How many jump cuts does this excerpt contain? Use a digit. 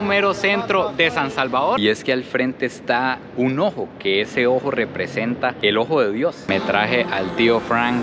2